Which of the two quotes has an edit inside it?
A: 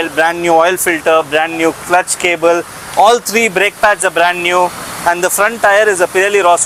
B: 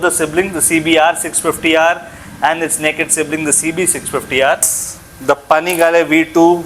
B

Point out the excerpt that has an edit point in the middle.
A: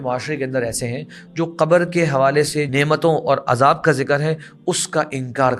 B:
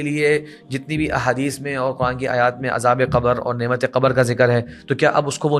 A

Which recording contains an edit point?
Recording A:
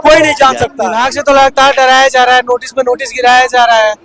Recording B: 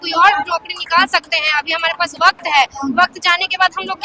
A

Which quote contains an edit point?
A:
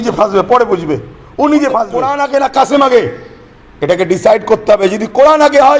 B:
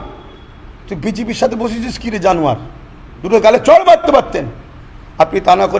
A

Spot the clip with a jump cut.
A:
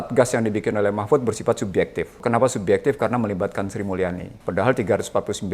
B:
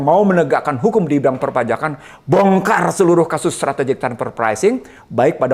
A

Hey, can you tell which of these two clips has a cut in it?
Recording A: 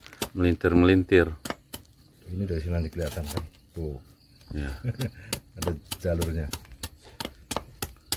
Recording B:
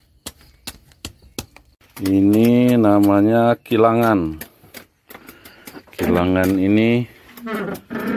B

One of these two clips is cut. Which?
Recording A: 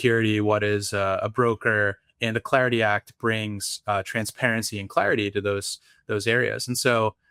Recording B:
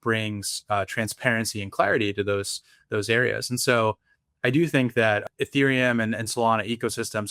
B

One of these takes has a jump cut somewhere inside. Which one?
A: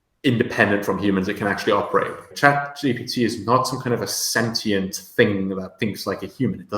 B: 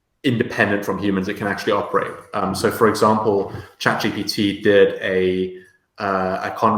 A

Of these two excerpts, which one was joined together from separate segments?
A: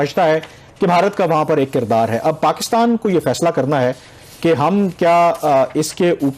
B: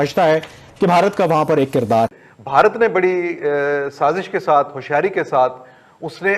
B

